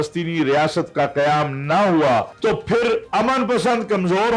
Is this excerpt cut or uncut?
cut